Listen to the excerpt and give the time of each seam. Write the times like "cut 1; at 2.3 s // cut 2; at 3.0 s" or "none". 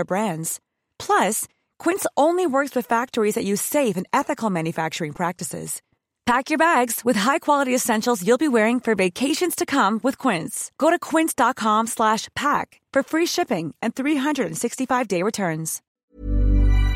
cut 1; at 16.0 s